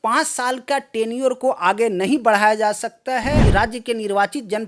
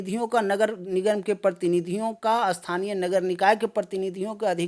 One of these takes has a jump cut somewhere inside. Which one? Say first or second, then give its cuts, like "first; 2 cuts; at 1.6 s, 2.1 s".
first; 1 cut; at 3.4 s